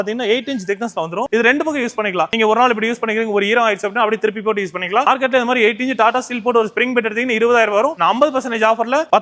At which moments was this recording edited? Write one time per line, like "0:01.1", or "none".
none